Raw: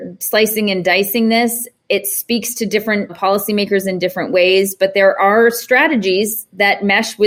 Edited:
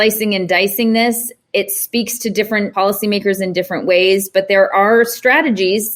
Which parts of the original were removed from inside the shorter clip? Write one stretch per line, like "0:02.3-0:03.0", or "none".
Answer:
0:03.1-0:03.2

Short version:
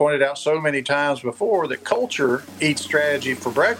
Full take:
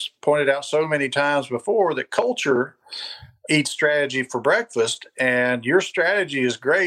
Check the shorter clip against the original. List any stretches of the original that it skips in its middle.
0:02.8-0:03.4

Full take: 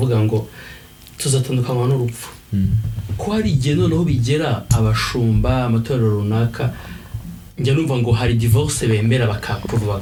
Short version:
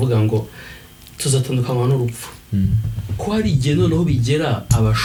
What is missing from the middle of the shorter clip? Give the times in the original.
none

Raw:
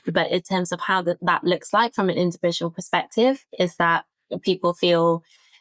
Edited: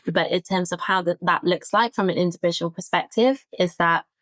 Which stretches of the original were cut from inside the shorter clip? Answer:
none

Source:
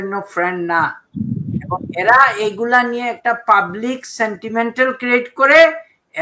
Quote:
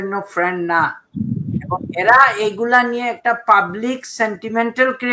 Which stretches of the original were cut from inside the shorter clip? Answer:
none

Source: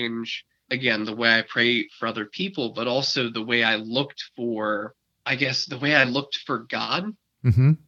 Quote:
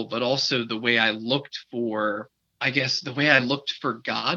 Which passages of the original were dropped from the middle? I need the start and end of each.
none

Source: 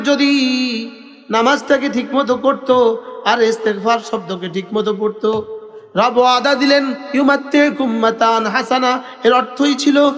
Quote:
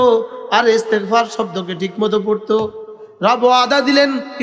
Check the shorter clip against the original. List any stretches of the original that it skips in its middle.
none

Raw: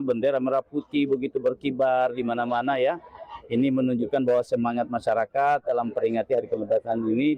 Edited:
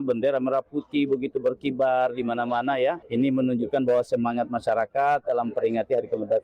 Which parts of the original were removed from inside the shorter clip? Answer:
0:03.0-0:03.4

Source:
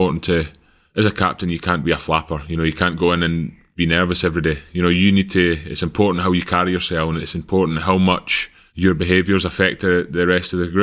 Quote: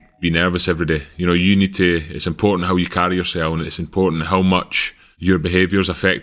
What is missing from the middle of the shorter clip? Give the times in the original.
none

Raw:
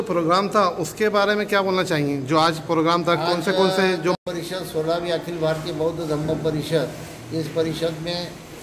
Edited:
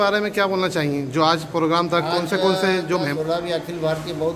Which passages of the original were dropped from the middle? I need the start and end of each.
0:04.2-0:04.7

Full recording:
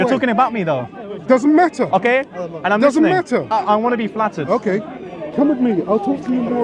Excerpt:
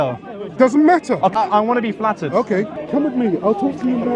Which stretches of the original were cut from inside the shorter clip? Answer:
0:02.0-0:03.5
0:04.9-0:05.2

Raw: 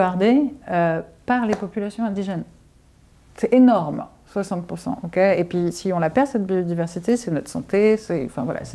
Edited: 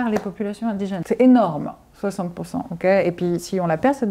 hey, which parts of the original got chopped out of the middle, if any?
0:02.4-0:03.3

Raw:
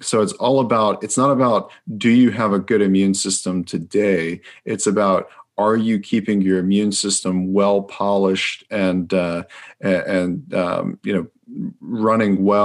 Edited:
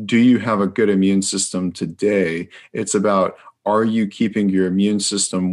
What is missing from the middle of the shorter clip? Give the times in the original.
none

